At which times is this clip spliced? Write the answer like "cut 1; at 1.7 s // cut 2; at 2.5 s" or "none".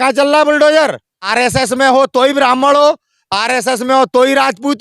cut 1; at 1.2 s